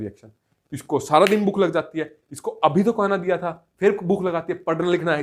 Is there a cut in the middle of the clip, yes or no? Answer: no